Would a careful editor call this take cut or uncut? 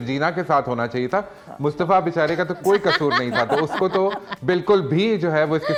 uncut